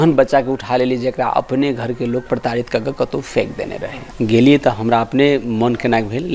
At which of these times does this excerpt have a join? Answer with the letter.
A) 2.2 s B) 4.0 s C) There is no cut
B